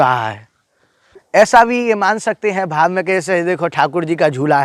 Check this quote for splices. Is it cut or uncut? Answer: cut